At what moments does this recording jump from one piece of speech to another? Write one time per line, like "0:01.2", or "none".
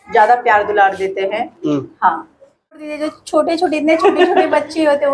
0:02.8